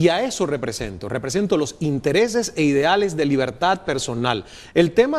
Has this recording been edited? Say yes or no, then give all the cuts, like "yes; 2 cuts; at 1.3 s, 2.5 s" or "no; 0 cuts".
yes; 1 cut; at 3.4 s